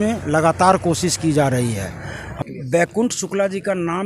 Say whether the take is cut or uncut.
cut